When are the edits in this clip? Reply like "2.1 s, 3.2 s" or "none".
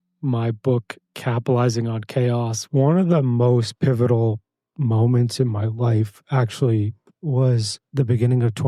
2.6 s, 7.0 s, 7.8 s